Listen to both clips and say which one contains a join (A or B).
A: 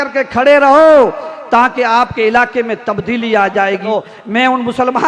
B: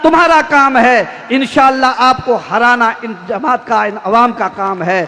A